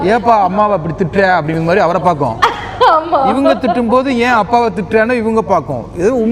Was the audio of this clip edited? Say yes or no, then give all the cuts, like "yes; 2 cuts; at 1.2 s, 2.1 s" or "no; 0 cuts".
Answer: no; 0 cuts